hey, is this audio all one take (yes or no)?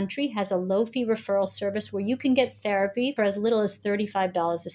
no